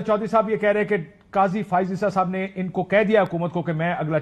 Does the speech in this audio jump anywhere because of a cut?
no; 0 cuts

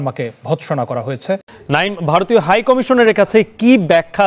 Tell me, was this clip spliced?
yes; 1 cut; at 1.5 s

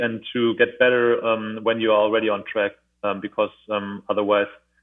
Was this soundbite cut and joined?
no; 0 cuts

